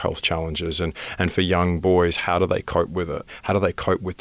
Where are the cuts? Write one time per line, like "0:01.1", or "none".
0:03.3